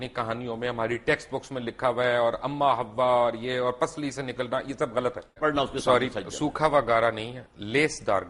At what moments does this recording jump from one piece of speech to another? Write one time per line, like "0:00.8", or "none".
0:05.4